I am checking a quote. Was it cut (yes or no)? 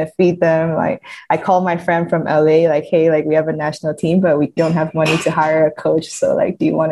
yes